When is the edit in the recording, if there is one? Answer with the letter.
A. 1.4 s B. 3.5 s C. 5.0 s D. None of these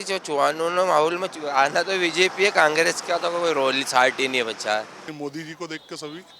C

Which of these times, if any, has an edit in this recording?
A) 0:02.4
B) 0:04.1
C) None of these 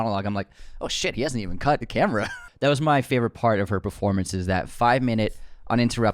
A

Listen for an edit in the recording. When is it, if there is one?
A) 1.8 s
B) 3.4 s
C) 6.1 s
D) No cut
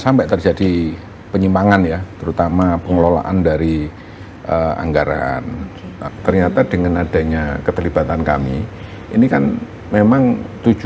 C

